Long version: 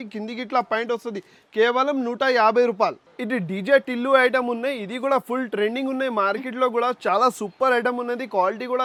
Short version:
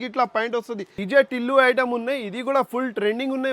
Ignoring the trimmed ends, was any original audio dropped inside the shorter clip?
yes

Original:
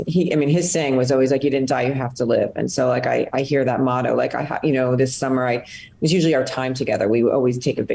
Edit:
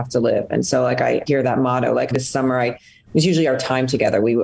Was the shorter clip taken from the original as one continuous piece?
no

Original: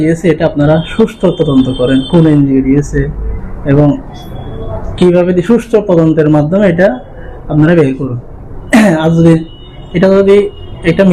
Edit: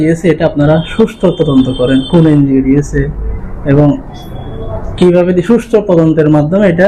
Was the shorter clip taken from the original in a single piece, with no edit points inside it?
yes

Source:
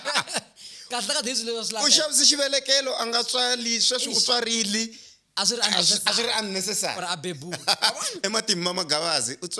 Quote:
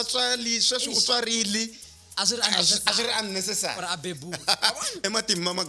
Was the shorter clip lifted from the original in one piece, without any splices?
yes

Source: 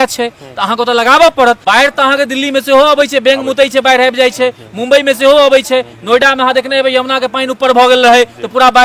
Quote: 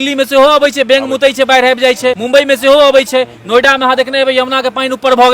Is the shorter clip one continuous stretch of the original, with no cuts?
no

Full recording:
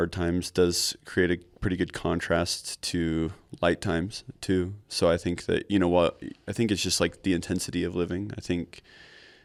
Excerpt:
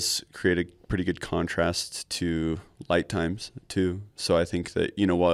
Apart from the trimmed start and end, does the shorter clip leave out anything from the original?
no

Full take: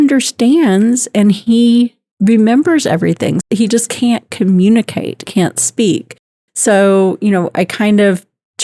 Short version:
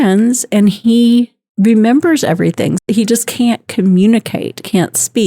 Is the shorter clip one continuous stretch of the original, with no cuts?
yes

